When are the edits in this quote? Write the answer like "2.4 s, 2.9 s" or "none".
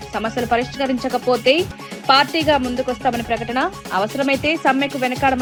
none